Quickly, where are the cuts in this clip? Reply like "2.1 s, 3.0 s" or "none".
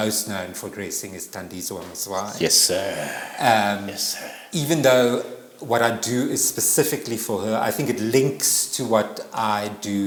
none